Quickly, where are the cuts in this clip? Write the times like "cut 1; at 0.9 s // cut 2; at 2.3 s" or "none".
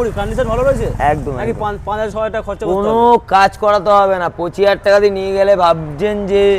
none

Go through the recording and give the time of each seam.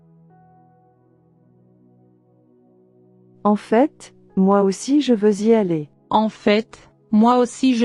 none

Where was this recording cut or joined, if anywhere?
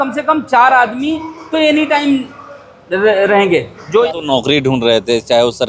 cut 1; at 4.1 s

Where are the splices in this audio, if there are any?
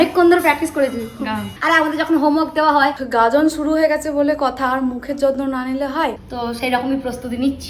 cut 1; at 1.6 s // cut 2; at 2.9 s // cut 3; at 6.2 s

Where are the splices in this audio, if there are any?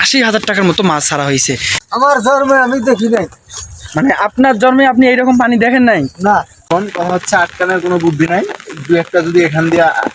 cut 1; at 1.8 s // cut 2; at 6.5 s

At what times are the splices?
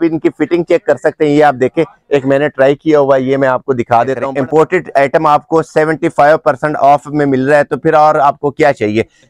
cut 1; at 4.2 s

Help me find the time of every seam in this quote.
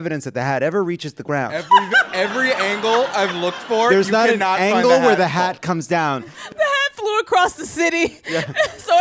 cut 1; at 6.4 s

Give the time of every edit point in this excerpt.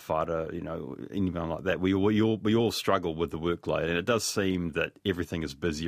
none

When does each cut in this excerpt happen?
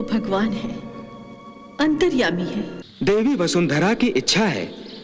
cut 1; at 2.8 s

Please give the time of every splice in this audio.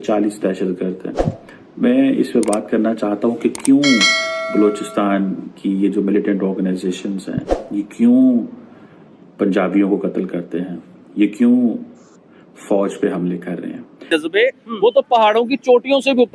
cut 1; at 14.1 s

